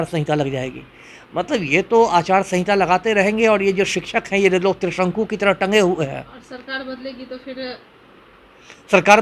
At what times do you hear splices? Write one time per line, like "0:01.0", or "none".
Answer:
none